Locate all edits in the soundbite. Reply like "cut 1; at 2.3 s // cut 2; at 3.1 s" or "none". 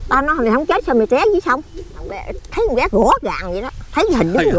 cut 1; at 2.4 s

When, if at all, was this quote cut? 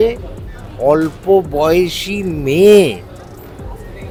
none

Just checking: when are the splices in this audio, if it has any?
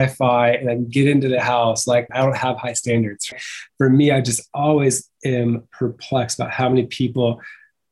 cut 1; at 2.1 s // cut 2; at 3.3 s

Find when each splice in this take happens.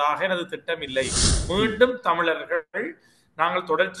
cut 1; at 1.4 s

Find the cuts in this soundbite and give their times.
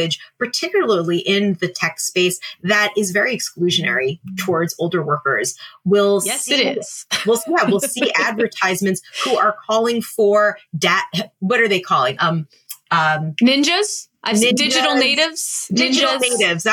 none

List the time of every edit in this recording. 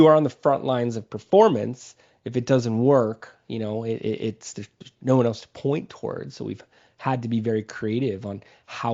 none

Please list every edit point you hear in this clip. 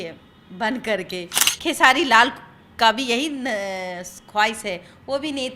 cut 1; at 1.4 s

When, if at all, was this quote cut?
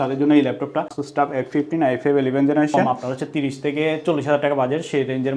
cut 1; at 1.0 s // cut 2; at 2.8 s

